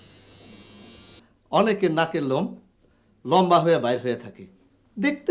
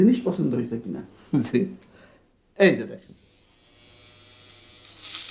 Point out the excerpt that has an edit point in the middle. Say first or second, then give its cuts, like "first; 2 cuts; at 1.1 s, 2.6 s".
first; 1 cut; at 1.2 s